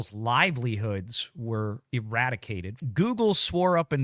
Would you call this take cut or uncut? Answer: cut